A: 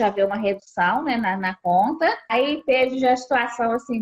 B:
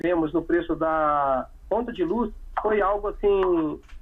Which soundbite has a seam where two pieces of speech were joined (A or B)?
A